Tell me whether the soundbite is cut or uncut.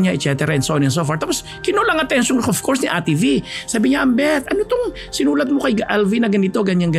uncut